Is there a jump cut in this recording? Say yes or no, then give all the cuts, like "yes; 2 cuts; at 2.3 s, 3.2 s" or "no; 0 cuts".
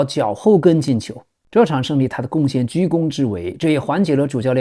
no; 0 cuts